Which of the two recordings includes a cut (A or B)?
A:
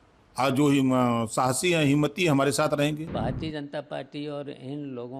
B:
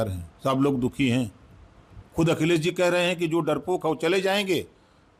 A